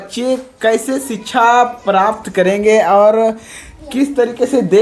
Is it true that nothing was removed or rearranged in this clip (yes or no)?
yes